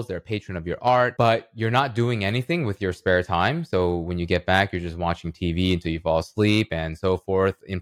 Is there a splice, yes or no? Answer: yes